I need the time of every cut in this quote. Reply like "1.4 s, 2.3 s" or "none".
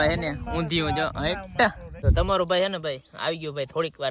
1.8 s